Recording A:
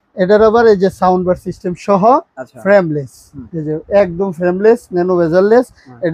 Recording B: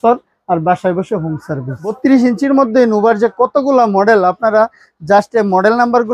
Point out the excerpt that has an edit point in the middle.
B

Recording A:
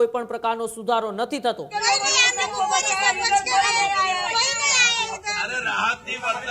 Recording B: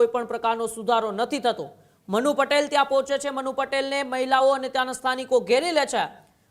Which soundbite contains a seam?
A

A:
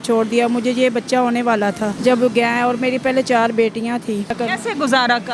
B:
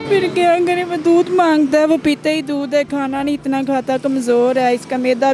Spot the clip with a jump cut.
A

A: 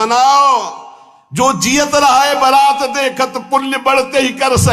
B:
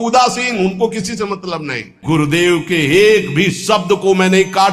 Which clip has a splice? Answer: B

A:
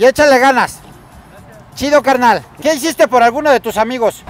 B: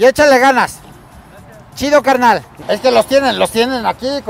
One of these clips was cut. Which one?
A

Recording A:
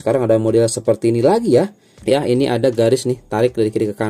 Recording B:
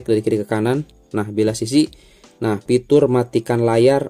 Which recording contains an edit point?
A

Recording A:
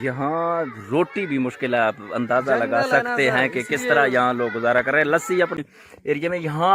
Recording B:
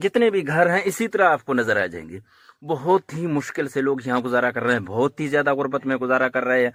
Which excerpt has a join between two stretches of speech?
A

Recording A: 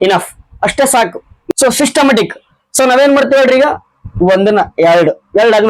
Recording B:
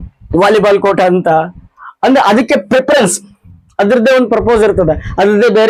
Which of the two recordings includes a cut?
A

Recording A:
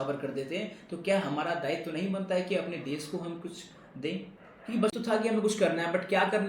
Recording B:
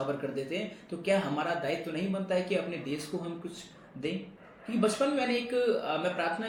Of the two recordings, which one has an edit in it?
A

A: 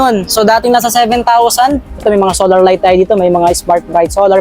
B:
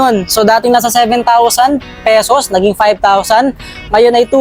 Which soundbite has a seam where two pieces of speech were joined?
A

